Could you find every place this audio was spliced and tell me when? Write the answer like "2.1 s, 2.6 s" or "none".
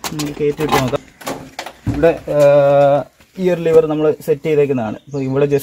1.0 s